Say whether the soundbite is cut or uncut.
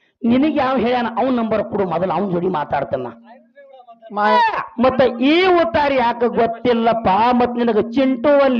cut